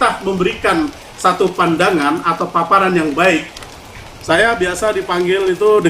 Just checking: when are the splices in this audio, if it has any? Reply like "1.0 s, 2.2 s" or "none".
3.6 s